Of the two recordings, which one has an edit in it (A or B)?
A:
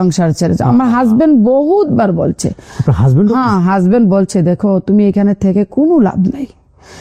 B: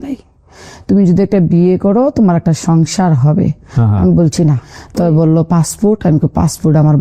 B